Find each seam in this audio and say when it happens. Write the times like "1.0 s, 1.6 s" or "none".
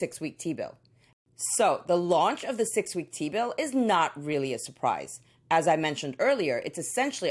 none